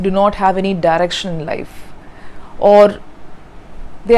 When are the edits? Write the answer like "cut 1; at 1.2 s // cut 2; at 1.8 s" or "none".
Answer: none